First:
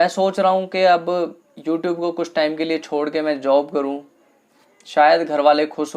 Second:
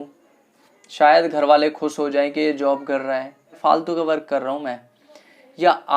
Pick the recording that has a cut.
second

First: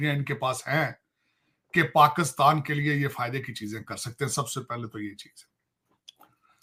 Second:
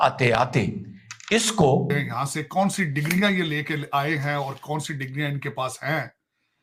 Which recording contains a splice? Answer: second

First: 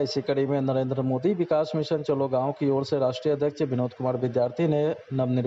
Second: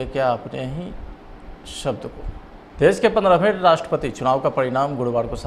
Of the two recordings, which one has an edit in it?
second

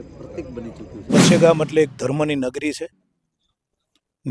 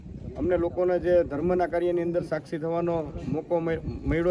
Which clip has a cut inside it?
first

